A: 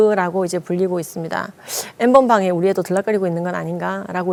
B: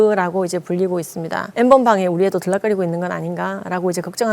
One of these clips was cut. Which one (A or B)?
B